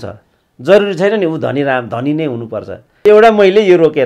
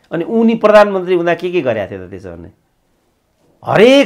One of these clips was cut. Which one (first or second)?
first